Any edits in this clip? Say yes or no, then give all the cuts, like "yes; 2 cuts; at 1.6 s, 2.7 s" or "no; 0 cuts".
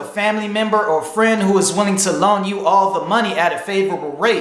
no; 0 cuts